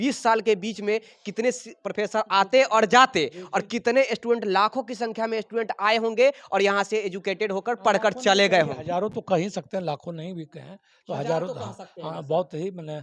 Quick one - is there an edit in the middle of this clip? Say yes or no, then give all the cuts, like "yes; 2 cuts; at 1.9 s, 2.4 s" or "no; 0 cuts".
no; 0 cuts